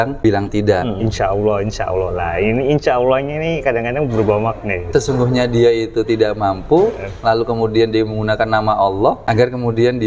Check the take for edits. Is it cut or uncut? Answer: cut